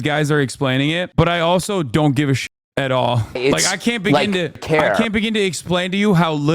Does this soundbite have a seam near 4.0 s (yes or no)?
yes